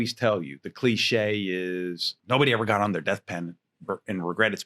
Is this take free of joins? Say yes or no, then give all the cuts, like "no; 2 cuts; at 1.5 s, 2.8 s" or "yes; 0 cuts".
no; 1 cut; at 2.1 s